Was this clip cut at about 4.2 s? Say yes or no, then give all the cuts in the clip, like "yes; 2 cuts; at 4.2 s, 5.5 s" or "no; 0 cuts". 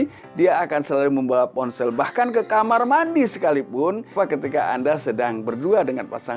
yes; 1 cut; at 4.2 s